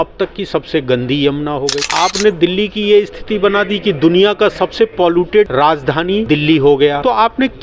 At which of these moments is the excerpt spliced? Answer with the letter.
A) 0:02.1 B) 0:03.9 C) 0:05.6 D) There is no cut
D